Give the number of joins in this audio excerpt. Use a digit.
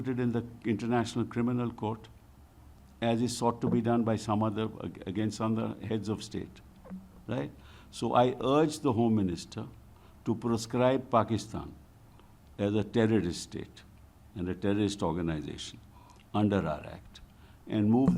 0